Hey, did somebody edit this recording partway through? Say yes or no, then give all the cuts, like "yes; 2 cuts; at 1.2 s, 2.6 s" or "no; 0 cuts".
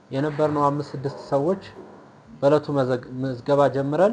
no; 0 cuts